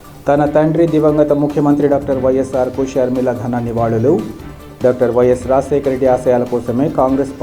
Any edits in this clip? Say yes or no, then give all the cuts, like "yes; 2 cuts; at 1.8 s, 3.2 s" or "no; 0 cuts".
no; 0 cuts